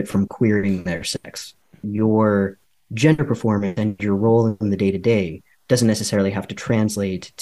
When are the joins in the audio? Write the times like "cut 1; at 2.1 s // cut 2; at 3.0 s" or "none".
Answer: cut 1; at 1.9 s